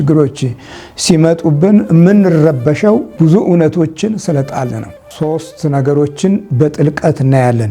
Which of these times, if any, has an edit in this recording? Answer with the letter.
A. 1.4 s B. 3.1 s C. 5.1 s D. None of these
C